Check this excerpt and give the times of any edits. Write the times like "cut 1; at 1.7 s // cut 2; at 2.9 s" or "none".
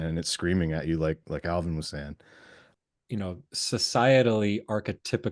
cut 1; at 2.7 s